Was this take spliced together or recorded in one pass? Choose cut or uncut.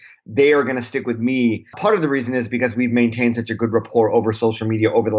cut